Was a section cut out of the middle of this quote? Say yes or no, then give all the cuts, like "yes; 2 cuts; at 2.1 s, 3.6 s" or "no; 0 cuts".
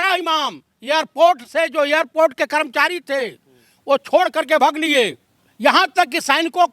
yes; 1 cut; at 5.4 s